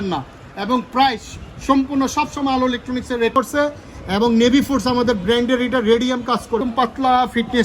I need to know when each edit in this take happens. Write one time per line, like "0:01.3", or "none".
0:03.3
0:06.6